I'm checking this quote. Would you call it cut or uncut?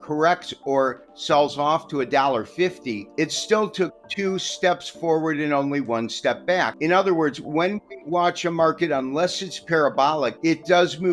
cut